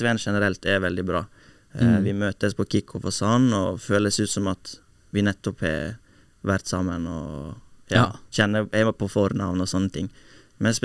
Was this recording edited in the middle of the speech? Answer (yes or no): no